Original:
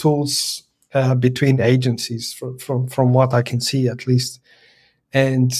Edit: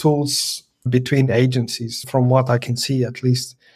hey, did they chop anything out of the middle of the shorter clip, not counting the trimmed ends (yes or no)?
yes